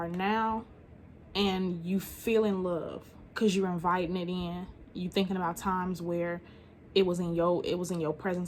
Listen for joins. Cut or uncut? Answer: uncut